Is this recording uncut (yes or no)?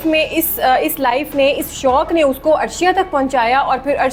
yes